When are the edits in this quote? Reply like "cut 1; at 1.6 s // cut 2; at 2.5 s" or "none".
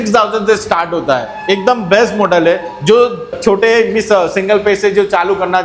cut 1; at 3.3 s